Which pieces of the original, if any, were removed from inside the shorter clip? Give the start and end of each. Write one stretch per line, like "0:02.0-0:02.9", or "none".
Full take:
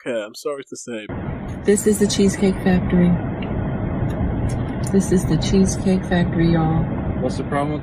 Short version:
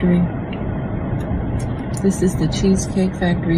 none